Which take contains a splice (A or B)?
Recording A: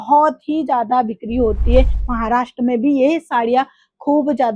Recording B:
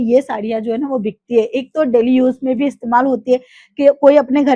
A